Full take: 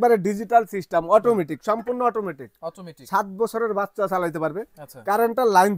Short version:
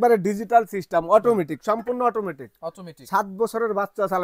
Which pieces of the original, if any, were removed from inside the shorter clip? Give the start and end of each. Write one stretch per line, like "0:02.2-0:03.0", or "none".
none